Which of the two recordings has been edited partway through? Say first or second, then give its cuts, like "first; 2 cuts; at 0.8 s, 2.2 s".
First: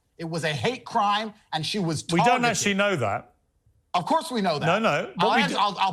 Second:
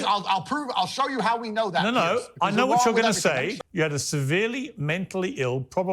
second; 1 cut; at 3.5 s